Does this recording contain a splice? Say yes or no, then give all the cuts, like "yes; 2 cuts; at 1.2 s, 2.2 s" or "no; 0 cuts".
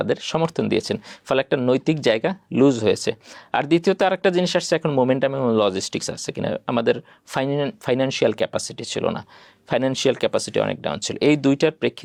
no; 0 cuts